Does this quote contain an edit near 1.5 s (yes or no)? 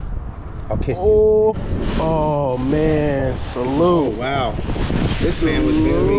yes